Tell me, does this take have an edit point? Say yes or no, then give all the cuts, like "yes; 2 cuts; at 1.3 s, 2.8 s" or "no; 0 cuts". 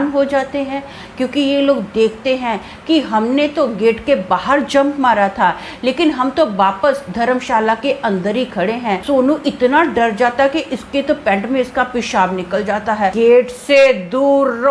yes; 2 cuts; at 9.0 s, 13.1 s